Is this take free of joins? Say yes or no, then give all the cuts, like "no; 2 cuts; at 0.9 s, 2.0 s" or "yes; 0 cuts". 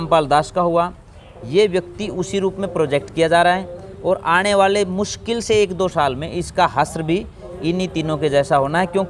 yes; 0 cuts